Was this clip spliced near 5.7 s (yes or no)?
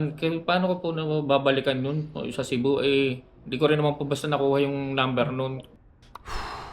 yes